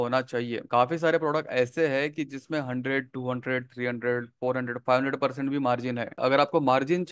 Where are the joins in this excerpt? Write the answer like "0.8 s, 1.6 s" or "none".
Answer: 6.0 s